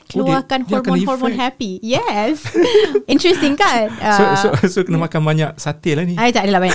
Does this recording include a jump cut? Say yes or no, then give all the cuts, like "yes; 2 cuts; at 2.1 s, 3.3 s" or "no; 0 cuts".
no; 0 cuts